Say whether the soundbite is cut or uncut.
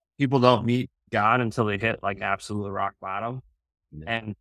uncut